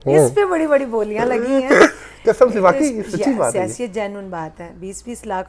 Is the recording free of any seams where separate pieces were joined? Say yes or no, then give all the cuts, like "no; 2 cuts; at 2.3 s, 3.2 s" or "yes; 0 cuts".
yes; 0 cuts